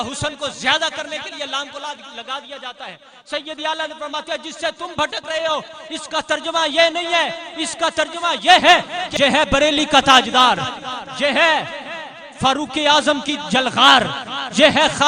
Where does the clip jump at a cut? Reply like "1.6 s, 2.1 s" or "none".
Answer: 9.0 s